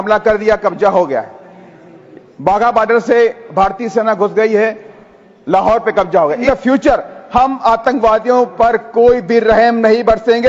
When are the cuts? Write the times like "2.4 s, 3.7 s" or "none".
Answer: 6.4 s